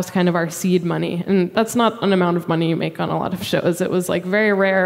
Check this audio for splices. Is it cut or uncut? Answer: cut